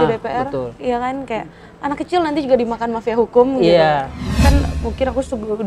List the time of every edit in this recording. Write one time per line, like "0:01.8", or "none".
0:04.3